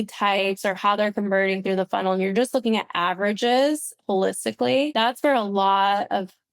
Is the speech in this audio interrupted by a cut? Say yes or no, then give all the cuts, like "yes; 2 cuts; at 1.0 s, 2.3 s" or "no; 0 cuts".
yes; 1 cut; at 4.9 s